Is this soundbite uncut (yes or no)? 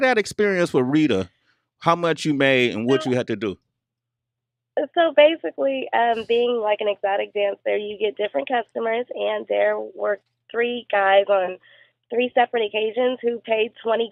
yes